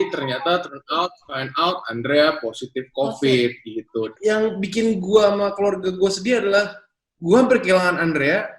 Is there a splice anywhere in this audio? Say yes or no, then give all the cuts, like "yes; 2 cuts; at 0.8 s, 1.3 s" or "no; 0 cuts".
yes; 1 cut; at 4.1 s